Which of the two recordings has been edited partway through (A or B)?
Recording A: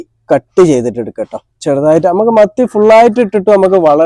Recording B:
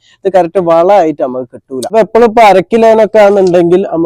B